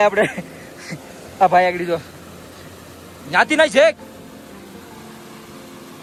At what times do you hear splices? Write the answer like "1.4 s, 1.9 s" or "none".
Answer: none